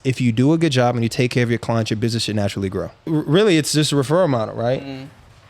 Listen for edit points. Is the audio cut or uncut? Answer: cut